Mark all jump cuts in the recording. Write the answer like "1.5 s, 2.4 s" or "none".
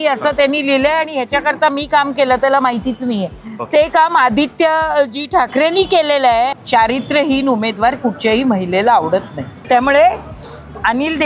6.6 s, 9.6 s